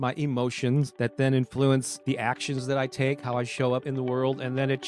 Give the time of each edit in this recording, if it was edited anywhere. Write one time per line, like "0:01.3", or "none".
0:00.9
0:01.9
0:03.8